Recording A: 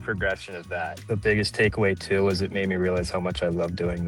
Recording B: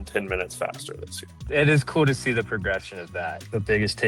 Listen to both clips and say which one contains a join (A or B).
B